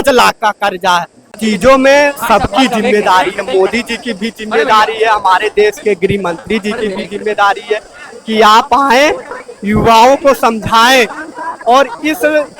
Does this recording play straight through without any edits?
no; 1 cut; at 1.4 s

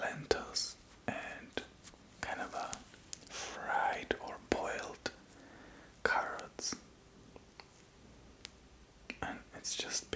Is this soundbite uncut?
yes; 0 cuts

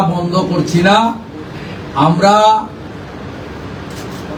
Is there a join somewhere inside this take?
no; 0 cuts

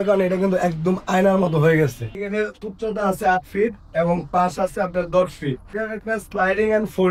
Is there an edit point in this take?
yes; 2 cuts; at 2.1 s, 5.7 s

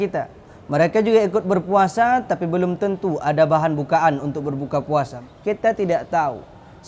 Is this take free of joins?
no; 1 cut; at 5.1 s

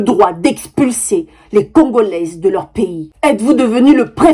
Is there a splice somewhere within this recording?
yes; 1 cut; at 3.0 s

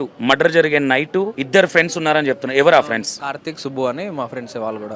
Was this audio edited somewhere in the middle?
yes; 1 cut; at 1.4 s

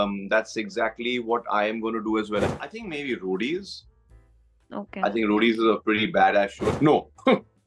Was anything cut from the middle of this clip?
yes; 2 cuts; at 2.5 s, 6.8 s

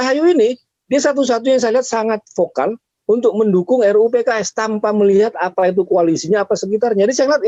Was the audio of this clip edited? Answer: no; 0 cuts

